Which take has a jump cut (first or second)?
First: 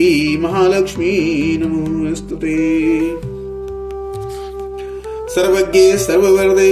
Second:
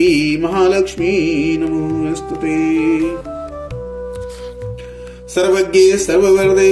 first